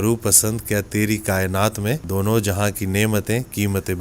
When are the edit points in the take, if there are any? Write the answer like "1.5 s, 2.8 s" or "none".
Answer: 2.0 s